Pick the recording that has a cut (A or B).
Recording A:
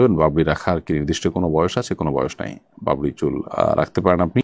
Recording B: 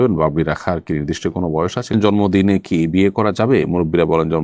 B